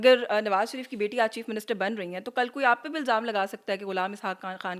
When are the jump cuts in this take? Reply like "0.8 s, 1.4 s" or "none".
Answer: none